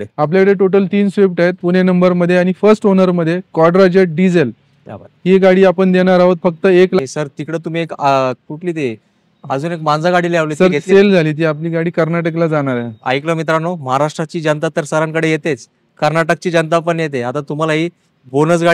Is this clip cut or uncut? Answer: cut